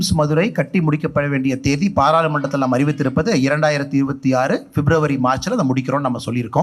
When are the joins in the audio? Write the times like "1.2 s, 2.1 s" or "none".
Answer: none